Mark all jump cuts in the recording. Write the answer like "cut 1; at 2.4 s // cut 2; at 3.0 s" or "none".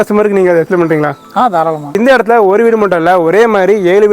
cut 1; at 2.0 s